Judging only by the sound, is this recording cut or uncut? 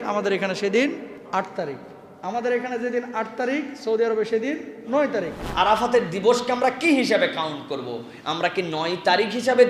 cut